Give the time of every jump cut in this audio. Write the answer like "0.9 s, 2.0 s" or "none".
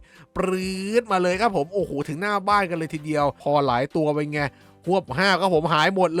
3.4 s